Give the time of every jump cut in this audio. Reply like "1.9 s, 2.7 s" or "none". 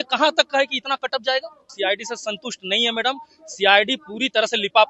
1.6 s